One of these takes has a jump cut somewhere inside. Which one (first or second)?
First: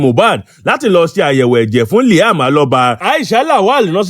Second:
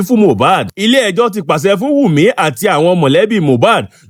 first